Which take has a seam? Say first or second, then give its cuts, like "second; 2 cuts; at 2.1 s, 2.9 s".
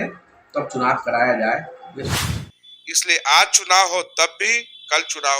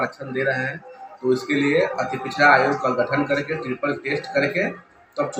first; 1 cut; at 2.2 s